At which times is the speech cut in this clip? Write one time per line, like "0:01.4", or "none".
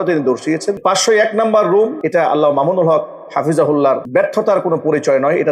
0:00.8
0:02.0
0:04.0